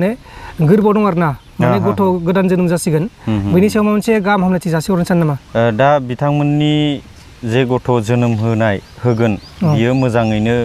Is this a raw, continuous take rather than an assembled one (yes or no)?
yes